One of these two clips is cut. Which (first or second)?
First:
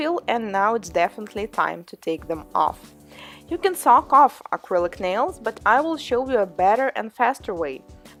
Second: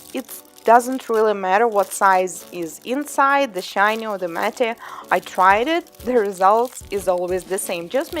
second